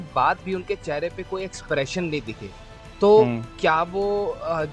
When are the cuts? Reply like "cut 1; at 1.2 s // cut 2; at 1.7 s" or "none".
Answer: none